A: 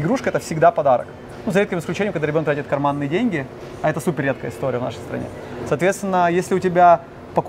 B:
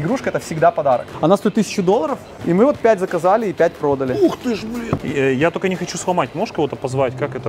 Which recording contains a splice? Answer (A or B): B